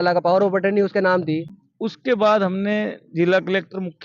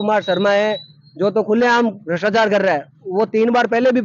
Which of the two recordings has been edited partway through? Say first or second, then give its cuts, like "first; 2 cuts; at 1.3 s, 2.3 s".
first; 1 cut; at 1.6 s